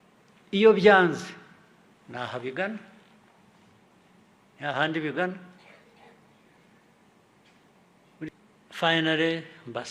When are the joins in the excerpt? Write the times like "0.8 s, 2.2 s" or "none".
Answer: 8.3 s